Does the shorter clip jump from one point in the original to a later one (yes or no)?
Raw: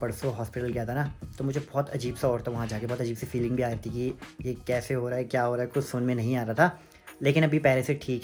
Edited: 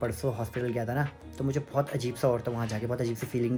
no